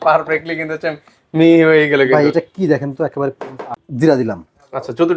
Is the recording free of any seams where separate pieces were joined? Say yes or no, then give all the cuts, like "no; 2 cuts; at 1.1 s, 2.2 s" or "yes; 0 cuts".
no; 1 cut; at 3.8 s